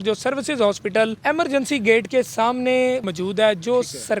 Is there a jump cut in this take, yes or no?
yes